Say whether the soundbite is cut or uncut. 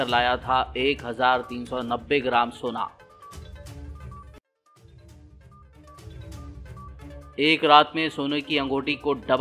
uncut